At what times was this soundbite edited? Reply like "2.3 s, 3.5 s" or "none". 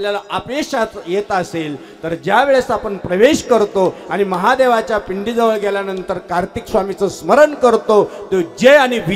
none